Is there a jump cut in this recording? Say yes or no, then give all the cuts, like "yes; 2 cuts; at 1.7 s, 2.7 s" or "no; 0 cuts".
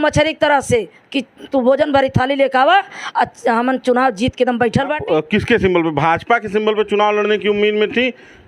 yes; 1 cut; at 5.0 s